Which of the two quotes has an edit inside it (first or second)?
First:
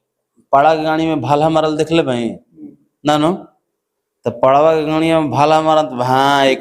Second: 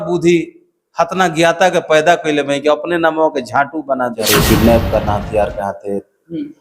second